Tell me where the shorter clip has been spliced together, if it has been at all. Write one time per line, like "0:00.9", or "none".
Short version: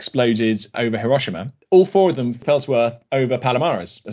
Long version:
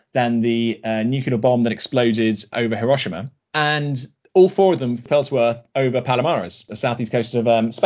0:01.5